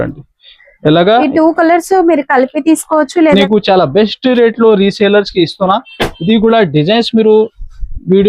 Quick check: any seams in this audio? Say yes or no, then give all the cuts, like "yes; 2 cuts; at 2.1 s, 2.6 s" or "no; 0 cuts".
yes; 1 cut; at 3.3 s